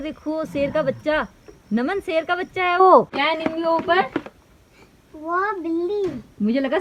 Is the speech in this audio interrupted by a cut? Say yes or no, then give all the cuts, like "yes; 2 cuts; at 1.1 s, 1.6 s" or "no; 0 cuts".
no; 0 cuts